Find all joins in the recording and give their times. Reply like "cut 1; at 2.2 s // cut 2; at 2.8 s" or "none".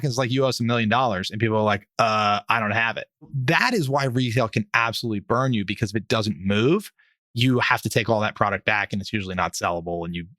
cut 1; at 3.4 s